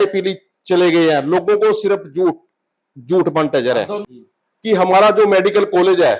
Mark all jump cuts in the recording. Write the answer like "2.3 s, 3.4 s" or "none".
4.0 s